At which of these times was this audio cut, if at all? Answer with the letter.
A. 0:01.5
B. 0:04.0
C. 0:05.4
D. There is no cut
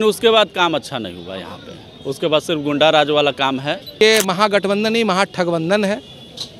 B